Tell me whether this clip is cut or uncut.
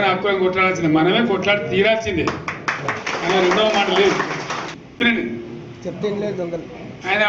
cut